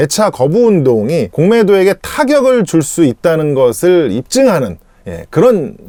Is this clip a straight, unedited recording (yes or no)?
yes